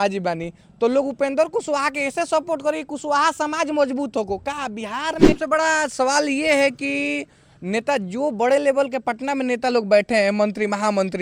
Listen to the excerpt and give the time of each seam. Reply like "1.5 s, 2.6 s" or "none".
5.4 s

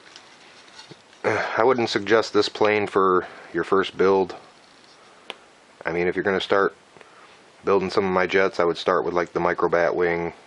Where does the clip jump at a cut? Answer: 3.7 s

